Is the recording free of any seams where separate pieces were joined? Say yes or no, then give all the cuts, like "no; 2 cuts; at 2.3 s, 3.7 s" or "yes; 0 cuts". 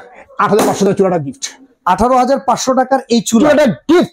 yes; 0 cuts